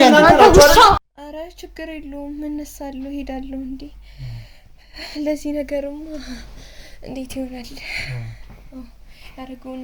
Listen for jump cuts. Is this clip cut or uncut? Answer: cut